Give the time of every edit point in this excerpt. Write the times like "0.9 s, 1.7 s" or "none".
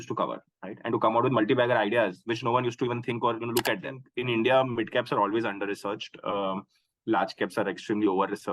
4.1 s